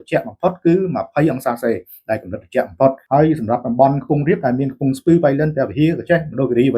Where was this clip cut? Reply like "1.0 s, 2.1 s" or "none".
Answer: 3.0 s